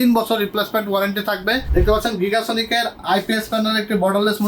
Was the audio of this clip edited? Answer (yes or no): yes